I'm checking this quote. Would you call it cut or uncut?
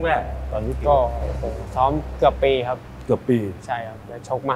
uncut